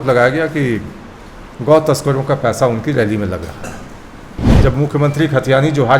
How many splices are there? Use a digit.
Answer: 1